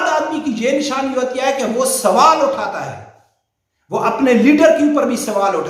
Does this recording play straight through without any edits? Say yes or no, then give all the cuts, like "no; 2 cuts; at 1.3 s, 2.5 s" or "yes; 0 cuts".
yes; 0 cuts